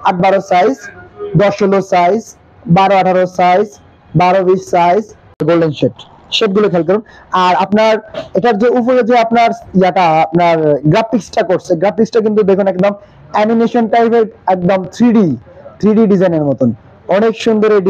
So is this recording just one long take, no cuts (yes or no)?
no